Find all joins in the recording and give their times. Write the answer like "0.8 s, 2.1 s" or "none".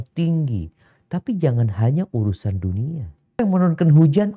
3.4 s

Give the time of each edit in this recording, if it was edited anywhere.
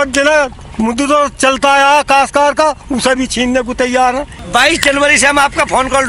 4.4 s

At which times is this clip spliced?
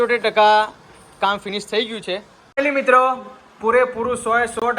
2.4 s

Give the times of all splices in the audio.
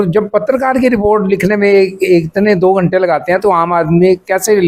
none

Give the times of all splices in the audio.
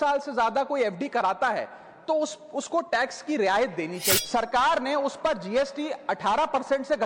4.2 s

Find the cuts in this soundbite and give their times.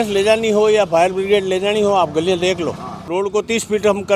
3.1 s

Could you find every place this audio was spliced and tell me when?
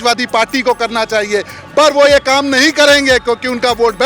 none

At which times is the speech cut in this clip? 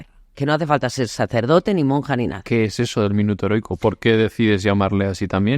2.4 s

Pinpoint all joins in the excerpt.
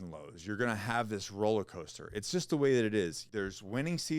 3.2 s

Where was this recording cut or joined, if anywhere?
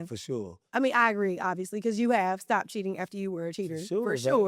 none

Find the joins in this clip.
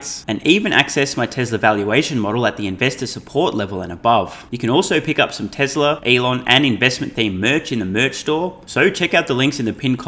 4.4 s, 6.0 s, 8.6 s

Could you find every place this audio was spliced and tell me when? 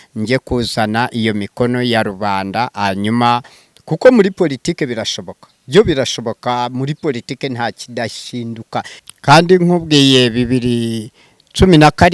8.9 s

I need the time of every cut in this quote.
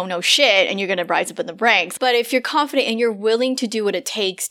1.9 s

